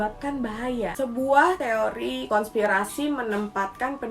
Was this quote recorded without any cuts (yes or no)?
no